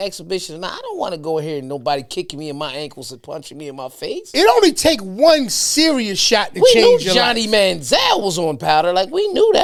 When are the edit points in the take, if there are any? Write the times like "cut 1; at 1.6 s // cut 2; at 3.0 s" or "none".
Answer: none